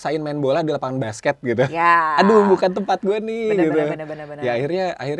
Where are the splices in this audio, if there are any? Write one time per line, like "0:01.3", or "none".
none

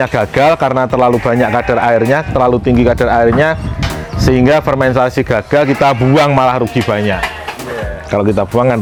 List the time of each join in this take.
none

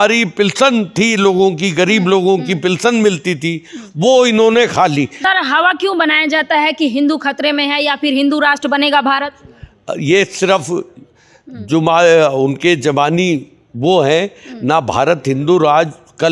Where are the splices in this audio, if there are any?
0:05.2

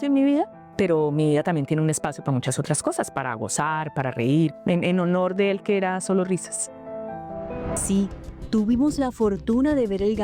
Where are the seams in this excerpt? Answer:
0:07.8

